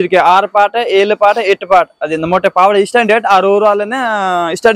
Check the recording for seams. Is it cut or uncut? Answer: uncut